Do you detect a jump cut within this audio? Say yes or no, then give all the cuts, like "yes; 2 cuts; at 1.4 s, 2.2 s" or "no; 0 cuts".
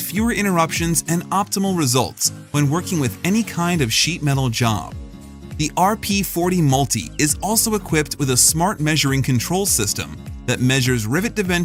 no; 0 cuts